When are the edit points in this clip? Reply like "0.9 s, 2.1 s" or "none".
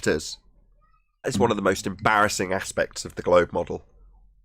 1.3 s